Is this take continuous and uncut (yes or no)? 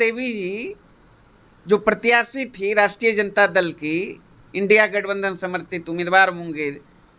yes